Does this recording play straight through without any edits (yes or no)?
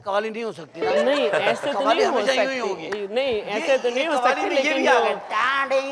yes